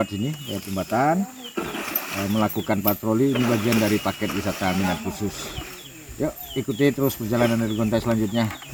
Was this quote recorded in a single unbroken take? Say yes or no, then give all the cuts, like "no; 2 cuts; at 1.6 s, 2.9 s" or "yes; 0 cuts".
yes; 0 cuts